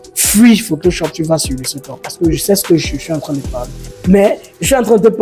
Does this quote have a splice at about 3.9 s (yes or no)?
yes